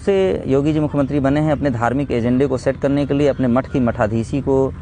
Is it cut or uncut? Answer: uncut